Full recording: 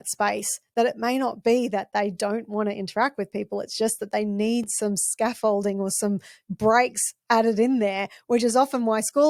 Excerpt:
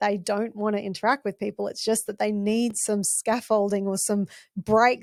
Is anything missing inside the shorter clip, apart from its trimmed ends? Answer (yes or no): no